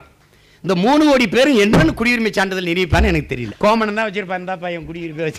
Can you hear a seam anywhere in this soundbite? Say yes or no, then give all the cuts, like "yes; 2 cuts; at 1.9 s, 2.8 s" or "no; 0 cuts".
yes; 1 cut; at 3.4 s